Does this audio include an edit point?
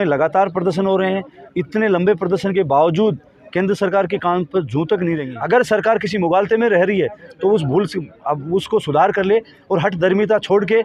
yes; 1 cut; at 5.3 s

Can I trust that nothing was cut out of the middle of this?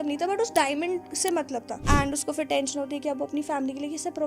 no; 1 cut; at 1.7 s

